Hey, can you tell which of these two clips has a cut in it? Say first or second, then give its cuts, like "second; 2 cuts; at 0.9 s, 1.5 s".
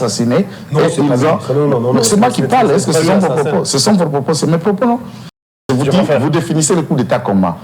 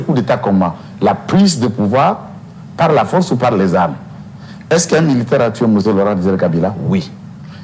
first; 1 cut; at 5.5 s